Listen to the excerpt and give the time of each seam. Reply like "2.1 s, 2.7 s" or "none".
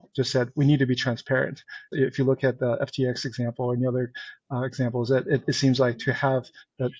1.9 s